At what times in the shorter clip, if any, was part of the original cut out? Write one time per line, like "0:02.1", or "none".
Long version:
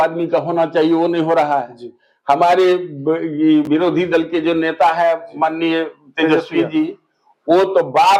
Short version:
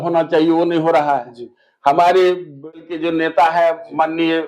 0:02.8

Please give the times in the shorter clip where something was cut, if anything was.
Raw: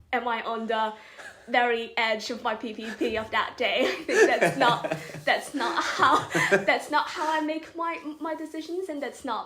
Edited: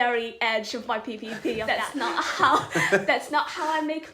0:01.7

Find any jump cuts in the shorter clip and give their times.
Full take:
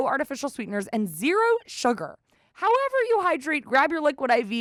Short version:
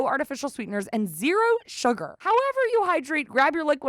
0:02.1

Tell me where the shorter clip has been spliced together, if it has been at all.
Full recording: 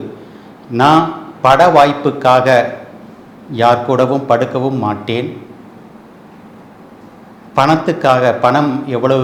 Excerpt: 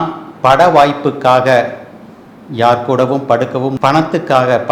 0:03.8

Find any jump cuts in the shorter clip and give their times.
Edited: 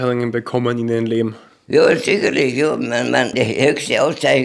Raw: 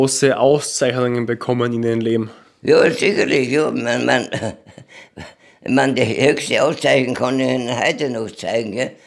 0:03.3

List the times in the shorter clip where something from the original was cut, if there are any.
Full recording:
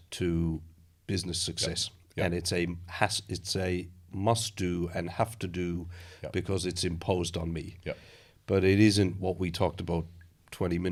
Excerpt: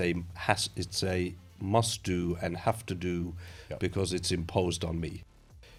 none

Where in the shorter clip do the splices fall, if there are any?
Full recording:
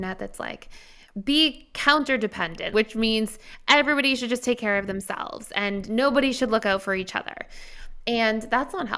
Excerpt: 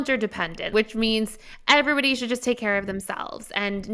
none

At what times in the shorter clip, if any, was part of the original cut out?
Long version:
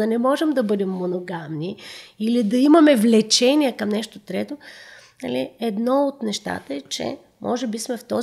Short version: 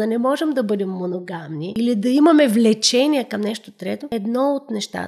0:01.7
0:04.0

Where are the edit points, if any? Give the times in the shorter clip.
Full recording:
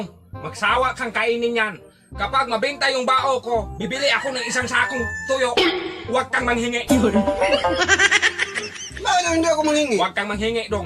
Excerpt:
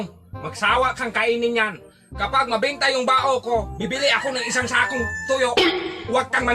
none

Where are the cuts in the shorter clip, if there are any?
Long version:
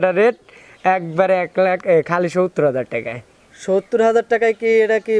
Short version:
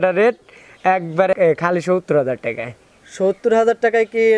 0:01.3

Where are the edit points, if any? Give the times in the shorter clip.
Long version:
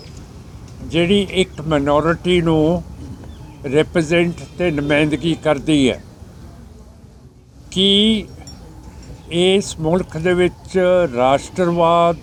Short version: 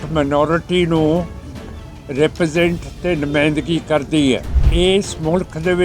0:04.6

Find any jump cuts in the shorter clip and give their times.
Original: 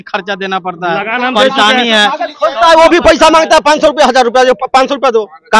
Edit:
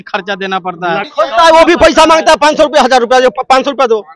0:01.1

